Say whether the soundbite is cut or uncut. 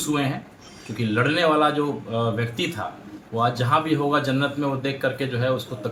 uncut